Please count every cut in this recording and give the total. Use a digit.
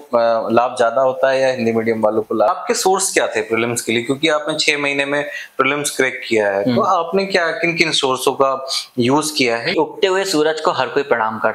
2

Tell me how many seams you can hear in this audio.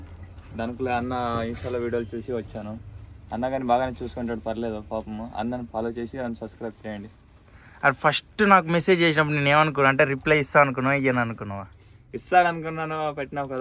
0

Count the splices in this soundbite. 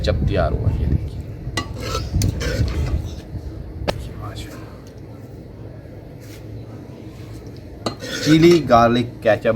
0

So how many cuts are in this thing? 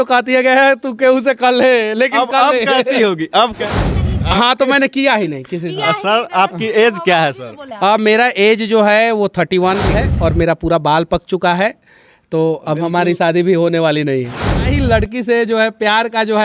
3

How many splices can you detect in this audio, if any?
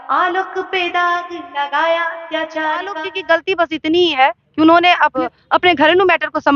2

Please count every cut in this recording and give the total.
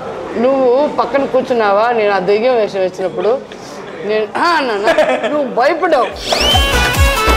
0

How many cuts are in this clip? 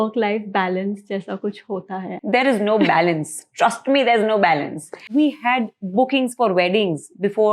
2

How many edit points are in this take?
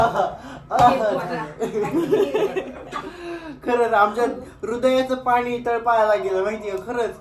0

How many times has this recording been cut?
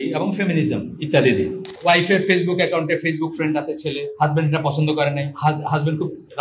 3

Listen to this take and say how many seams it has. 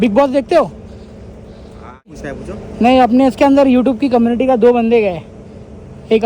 1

